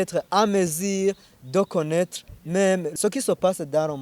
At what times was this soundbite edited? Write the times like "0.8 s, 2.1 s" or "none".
1.3 s, 2.9 s